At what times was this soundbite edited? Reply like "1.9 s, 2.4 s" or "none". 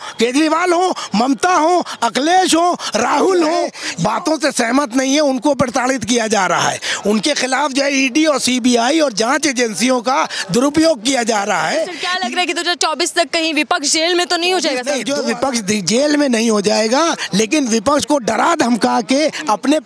3.8 s, 12.0 s, 15.0 s